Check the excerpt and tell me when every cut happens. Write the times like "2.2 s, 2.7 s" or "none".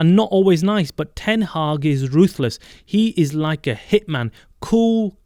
none